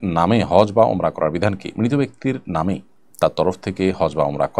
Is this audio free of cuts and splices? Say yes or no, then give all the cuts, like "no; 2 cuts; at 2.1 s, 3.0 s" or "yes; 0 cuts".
yes; 0 cuts